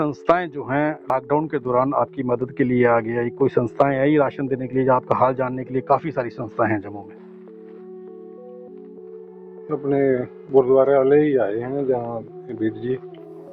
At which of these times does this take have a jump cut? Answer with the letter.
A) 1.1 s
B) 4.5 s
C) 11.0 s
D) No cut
A